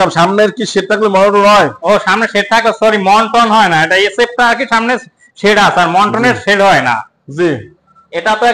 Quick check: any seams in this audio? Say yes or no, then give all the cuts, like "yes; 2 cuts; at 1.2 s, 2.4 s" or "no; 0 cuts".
no; 0 cuts